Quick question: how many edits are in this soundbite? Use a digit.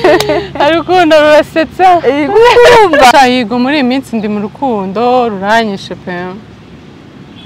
1